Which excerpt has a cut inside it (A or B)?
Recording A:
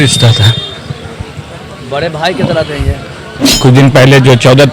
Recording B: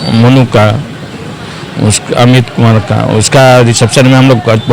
A